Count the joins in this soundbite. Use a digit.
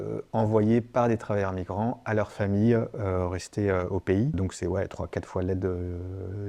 1